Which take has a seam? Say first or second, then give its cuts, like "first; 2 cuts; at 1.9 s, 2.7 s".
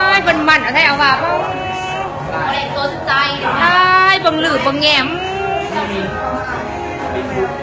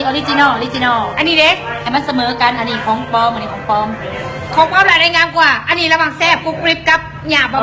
first; 1 cut; at 3.5 s